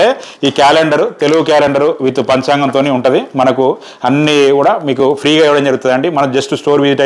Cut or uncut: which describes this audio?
uncut